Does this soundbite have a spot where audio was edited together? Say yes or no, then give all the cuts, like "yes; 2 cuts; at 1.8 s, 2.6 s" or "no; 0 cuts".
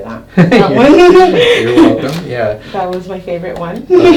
no; 0 cuts